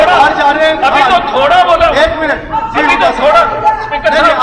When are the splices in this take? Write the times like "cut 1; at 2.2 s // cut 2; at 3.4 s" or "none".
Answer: none